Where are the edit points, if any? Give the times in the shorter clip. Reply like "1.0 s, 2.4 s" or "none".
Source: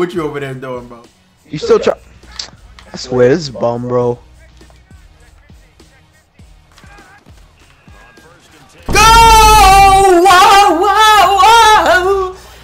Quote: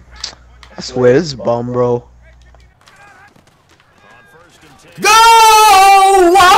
2.3 s